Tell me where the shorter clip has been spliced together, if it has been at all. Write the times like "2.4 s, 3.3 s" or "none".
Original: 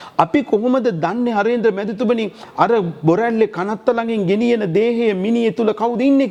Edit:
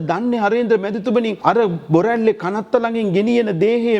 1.3 s

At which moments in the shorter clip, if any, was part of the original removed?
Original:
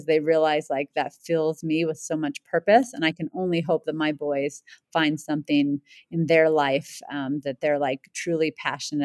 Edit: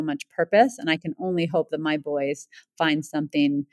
none

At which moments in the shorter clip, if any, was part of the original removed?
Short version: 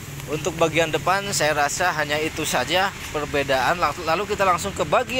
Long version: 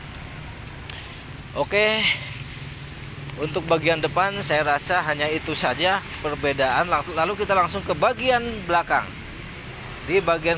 none

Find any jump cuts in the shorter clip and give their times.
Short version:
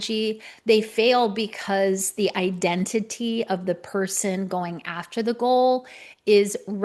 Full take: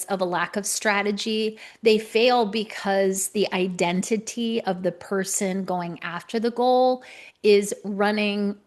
none

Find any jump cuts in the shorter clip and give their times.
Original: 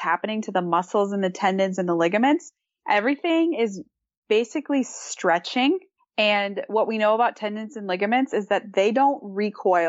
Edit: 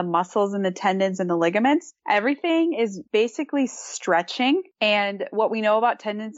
1.9 s, 3.0 s, 4.7 s

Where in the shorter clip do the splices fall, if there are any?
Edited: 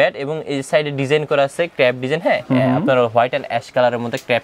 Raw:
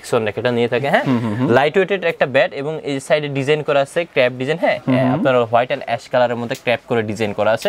none

